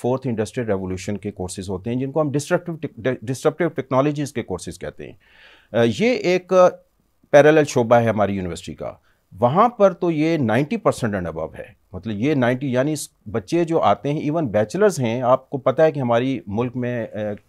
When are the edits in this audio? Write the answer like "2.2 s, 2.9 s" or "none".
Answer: none